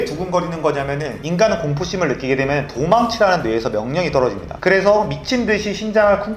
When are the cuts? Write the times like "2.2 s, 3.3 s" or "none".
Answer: none